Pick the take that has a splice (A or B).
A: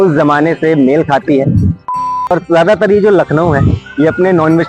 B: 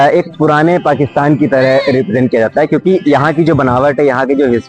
A